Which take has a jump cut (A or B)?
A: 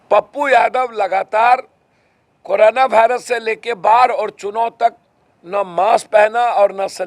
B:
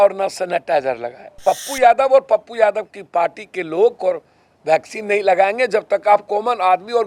B